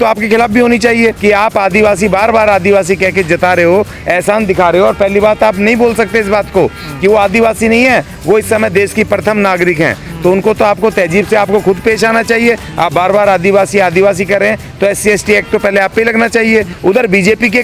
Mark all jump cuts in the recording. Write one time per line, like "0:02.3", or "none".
0:01.2
0:16.7